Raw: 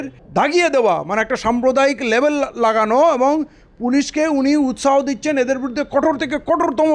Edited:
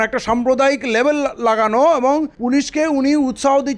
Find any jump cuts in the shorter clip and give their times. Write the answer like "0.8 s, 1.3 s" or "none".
2.3 s